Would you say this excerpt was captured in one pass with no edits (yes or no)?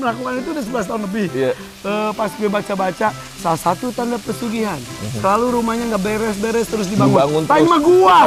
yes